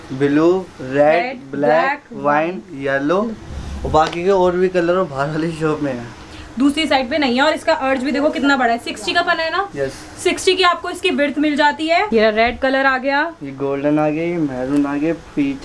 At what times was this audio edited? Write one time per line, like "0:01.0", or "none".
0:06.2
0:12.1

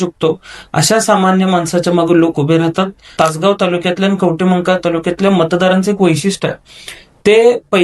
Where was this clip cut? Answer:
0:03.0

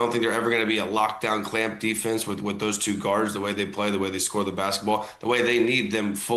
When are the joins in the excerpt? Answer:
none

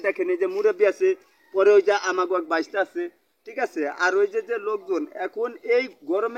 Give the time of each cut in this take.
none

